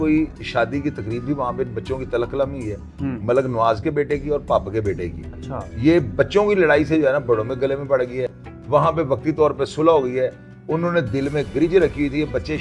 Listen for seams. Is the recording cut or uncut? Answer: uncut